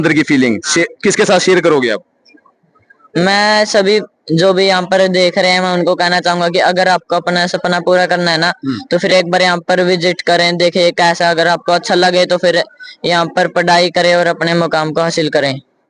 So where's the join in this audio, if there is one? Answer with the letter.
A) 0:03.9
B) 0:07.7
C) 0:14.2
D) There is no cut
D